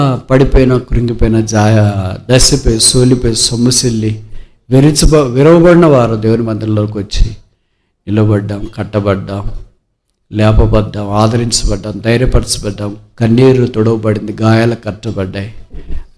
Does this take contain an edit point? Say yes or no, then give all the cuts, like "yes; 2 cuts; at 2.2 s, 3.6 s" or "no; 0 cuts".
no; 0 cuts